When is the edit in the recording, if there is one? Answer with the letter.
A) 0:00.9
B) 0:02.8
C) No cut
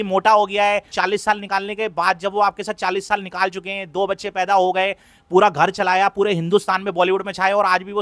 A